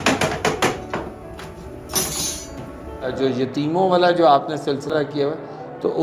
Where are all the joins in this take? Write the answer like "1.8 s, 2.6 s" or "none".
3.1 s